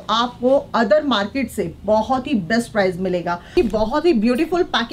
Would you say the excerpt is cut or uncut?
cut